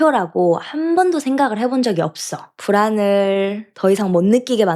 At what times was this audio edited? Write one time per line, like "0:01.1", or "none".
0:02.5
0:03.6